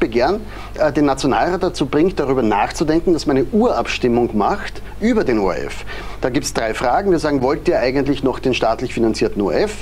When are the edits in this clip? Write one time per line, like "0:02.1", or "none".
none